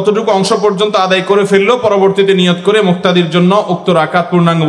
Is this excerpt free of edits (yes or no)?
yes